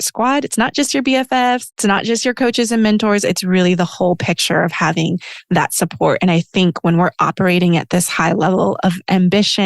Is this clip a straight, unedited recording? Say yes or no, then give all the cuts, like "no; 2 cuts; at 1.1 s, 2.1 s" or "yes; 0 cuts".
no; 1 cut; at 1.7 s